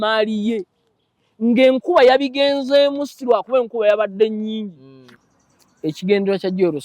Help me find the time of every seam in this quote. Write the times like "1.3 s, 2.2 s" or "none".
5.1 s